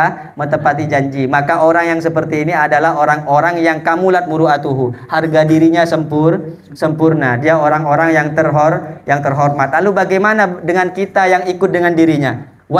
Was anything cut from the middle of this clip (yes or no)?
no